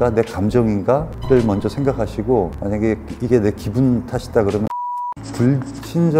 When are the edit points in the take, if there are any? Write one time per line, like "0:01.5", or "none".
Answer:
0:05.2

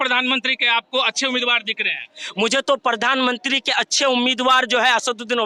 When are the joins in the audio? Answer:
none

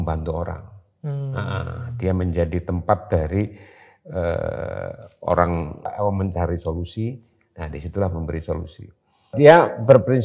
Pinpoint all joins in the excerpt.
0:05.9
0:09.3

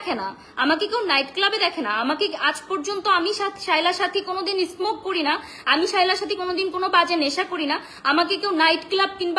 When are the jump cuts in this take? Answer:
none

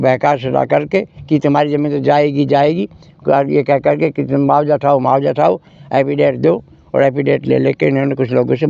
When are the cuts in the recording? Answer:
none

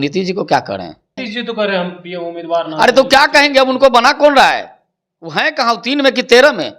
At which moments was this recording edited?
0:01.2

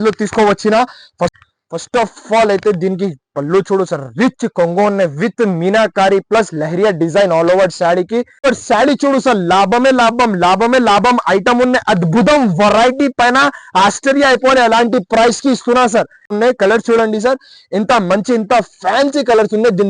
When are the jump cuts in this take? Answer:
0:01.3
0:08.4
0:16.3

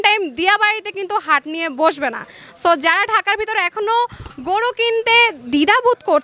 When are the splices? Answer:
none

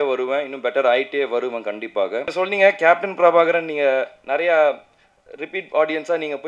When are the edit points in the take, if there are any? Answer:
0:02.3

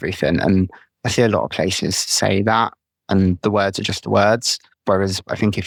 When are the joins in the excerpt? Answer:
none

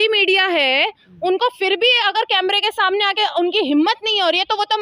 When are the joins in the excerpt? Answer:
none

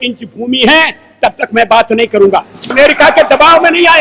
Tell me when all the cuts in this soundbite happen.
0:02.6

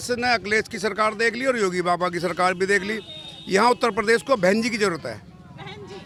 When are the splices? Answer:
none

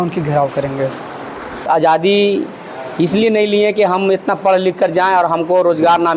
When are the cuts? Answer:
0:01.6

